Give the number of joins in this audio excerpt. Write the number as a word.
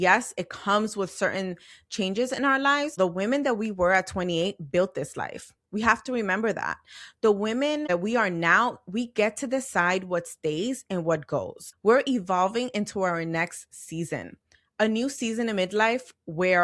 three